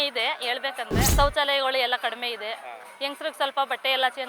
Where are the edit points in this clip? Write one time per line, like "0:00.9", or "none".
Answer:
0:01.1